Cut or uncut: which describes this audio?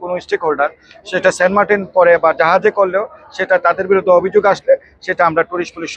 uncut